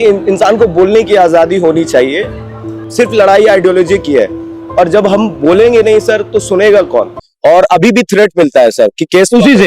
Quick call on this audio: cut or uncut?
cut